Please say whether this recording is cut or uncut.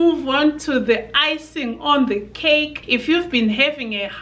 uncut